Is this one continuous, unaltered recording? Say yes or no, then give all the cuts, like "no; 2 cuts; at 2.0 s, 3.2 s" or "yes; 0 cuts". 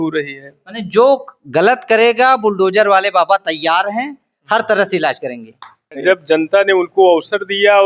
no; 1 cut; at 6.0 s